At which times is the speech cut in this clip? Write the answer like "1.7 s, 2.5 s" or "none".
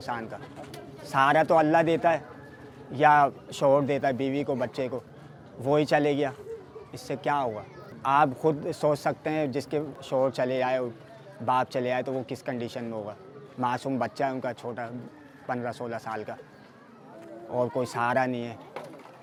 none

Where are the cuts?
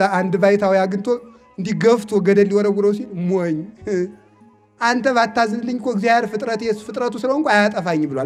none

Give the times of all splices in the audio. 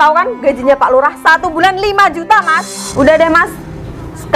2.8 s

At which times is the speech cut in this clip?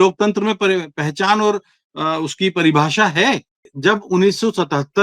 3.7 s

